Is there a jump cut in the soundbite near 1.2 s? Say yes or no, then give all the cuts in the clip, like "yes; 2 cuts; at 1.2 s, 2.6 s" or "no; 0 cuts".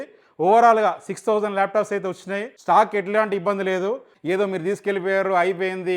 no; 2 cuts; at 2.5 s, 4.1 s